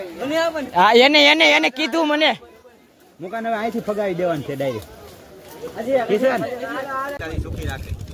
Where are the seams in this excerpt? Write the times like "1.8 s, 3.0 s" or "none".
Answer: 7.1 s